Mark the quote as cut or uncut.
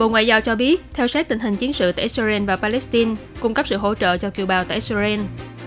uncut